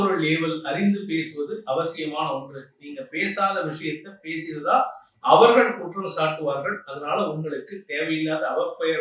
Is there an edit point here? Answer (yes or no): no